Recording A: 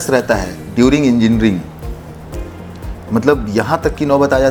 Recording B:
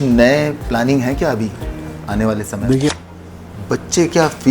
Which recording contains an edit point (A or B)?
B